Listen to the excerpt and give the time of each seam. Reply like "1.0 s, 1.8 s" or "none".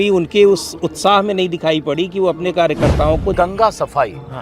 3.3 s